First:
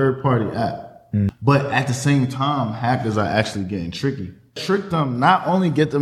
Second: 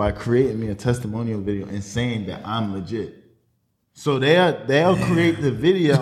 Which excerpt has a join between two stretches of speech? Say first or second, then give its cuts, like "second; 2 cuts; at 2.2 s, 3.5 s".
first; 2 cuts; at 1.3 s, 4.6 s